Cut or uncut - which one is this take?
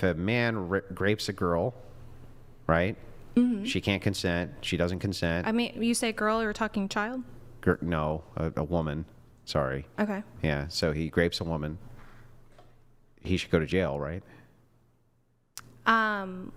uncut